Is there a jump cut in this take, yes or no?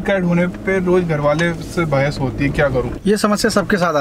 no